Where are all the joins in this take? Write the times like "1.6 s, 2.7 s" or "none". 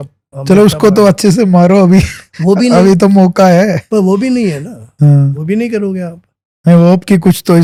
none